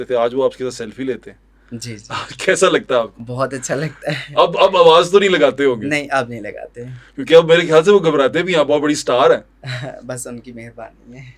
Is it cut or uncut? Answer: uncut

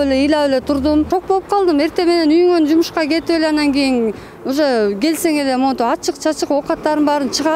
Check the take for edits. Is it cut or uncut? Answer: cut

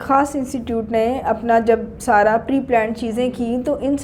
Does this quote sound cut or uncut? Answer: uncut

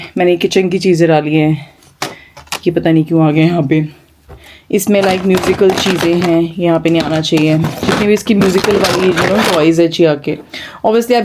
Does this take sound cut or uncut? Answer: uncut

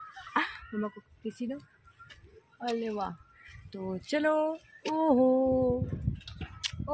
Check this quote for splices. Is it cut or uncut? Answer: uncut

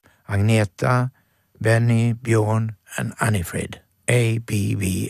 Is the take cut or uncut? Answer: cut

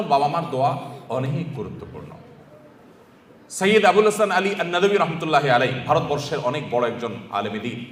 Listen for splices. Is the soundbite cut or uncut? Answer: uncut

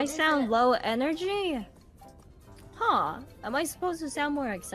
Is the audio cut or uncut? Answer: uncut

